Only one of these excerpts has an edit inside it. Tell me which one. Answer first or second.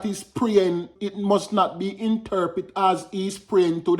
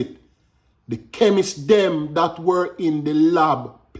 first